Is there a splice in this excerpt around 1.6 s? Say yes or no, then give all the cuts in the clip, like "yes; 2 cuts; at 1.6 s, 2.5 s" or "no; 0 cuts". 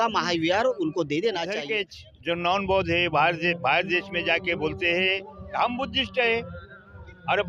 yes; 1 cut; at 1.6 s